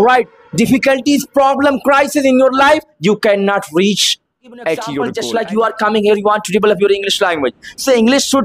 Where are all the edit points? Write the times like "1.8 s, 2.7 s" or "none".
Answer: 5.2 s